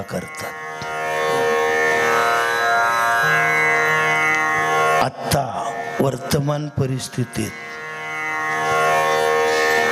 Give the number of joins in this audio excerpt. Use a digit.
0